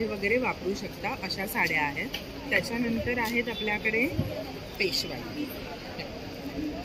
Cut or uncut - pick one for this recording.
uncut